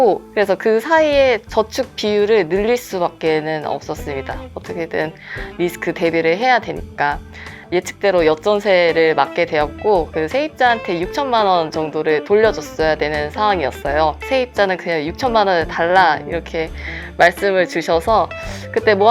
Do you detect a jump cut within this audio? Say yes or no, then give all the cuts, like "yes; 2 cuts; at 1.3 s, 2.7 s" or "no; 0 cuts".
yes; 2 cuts; at 7.6 s, 14.2 s